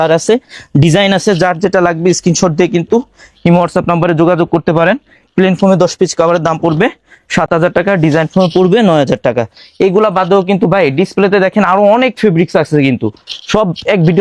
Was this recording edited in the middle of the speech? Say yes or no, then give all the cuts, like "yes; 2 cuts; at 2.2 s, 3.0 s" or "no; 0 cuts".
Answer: no; 0 cuts